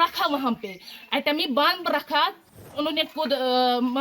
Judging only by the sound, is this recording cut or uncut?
cut